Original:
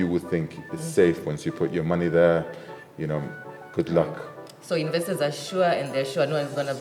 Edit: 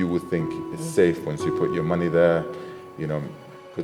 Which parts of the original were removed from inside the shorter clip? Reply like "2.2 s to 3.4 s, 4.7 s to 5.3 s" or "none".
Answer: none